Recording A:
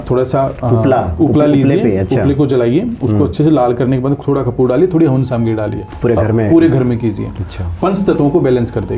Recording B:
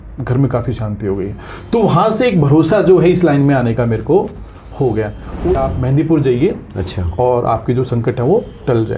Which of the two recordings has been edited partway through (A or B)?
B